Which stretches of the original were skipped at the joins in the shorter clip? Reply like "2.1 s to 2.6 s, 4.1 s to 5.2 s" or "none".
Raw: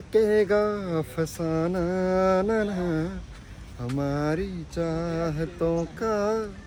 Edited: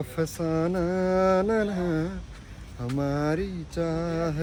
none